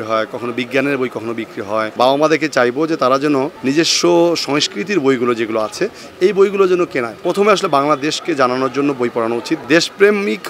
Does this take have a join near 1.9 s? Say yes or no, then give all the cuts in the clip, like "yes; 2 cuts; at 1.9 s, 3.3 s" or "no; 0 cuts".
yes; 4 cuts; at 1.9 s, 3.5 s, 7.1 s, 9.6 s